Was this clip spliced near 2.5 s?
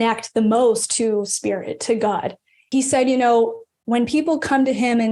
yes; 1 cut; at 2.5 s

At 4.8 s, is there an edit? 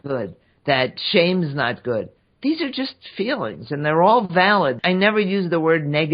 yes; 1 cut; at 4.8 s

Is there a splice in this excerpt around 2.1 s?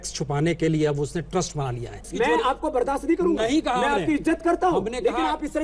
yes; 1 cut; at 2.1 s

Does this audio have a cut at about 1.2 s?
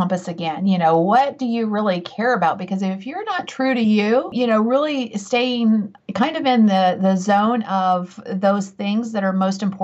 no; 0 cuts

